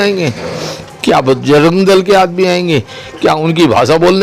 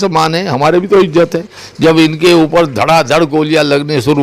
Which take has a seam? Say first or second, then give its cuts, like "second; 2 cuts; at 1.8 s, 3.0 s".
second; 1 cut; at 1.6 s